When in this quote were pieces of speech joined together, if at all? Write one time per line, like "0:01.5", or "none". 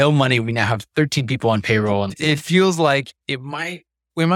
0:02.1